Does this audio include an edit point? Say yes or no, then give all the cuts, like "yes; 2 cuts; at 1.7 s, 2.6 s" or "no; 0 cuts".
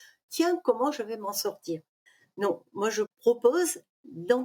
no; 0 cuts